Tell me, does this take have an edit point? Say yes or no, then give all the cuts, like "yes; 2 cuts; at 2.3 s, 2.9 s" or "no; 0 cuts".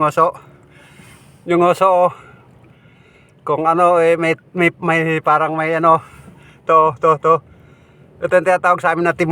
no; 0 cuts